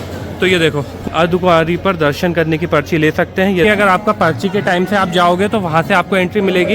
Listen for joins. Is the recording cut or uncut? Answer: cut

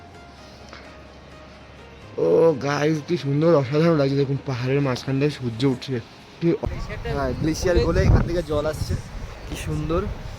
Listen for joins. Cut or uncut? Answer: cut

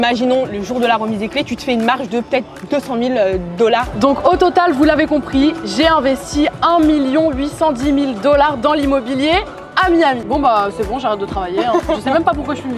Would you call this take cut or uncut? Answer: cut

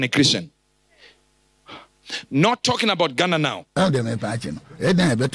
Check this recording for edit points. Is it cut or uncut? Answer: uncut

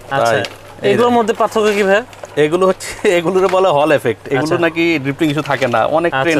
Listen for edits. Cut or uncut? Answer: uncut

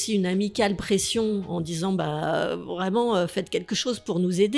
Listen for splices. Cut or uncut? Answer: uncut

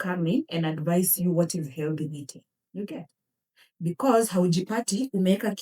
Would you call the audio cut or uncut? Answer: uncut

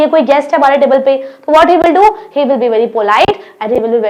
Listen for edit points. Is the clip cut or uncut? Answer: uncut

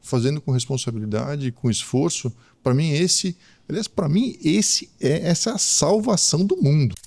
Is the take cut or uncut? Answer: uncut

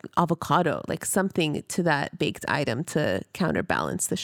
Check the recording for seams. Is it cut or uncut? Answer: uncut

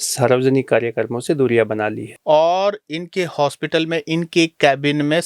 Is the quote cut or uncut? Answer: cut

